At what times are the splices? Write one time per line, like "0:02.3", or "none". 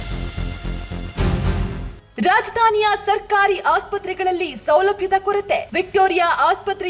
0:01.7